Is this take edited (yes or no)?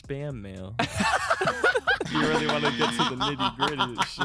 no